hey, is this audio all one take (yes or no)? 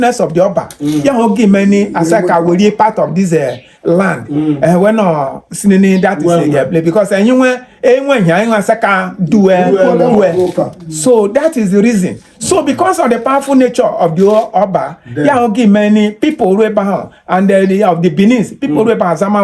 yes